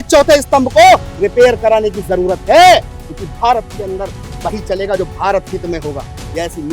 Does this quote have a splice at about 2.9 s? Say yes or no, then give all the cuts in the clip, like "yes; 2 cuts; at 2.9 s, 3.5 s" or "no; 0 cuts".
no; 0 cuts